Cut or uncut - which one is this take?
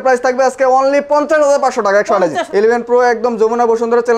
cut